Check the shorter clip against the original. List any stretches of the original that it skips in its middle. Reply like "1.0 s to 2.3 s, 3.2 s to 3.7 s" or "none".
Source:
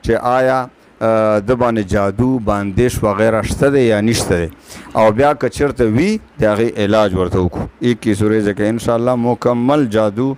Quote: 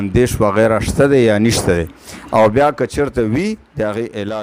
none

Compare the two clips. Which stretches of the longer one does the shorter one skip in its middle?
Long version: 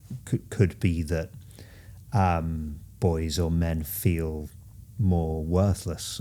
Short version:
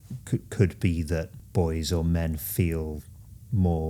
1.4 s to 2.8 s

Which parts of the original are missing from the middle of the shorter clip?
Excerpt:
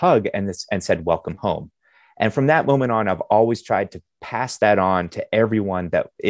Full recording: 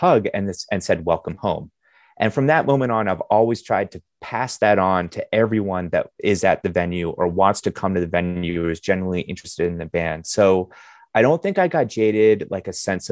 none

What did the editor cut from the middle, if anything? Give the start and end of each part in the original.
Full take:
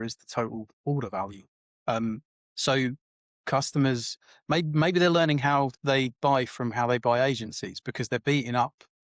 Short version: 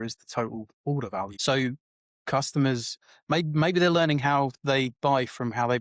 1.3 s to 2.5 s

